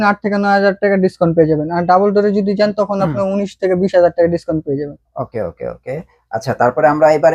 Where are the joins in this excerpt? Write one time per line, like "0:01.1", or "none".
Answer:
none